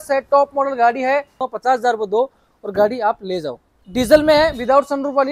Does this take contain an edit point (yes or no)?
yes